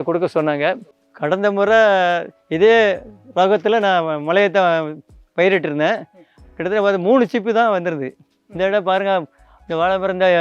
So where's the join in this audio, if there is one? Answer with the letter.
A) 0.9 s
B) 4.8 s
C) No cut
A